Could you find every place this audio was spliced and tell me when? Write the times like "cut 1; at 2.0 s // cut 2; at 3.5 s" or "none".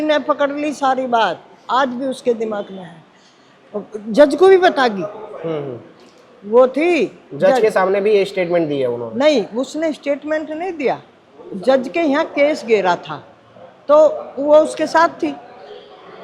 none